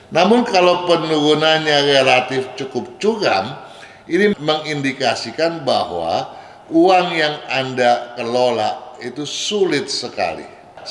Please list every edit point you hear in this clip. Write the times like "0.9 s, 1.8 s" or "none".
none